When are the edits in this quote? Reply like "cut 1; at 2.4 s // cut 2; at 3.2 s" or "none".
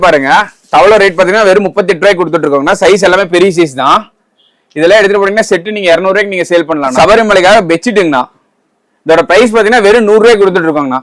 cut 1; at 6.9 s